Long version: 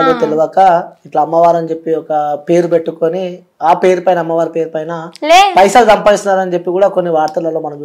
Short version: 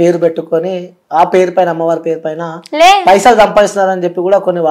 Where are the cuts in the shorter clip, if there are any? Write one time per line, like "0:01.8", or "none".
none